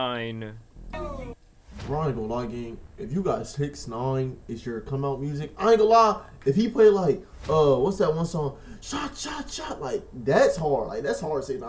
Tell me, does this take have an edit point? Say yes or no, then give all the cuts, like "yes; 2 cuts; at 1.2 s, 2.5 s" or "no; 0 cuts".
no; 0 cuts